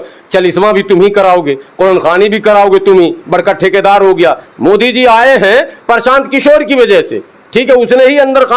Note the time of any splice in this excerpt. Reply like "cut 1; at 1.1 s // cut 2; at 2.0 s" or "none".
cut 1; at 4.5 s